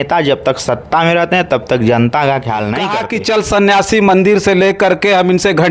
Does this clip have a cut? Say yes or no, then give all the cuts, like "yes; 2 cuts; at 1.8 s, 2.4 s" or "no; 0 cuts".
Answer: yes; 1 cut; at 3.0 s